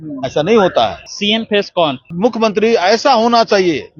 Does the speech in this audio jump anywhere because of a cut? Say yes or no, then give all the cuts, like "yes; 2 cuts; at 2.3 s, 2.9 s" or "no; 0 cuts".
yes; 2 cuts; at 1.1 s, 2.1 s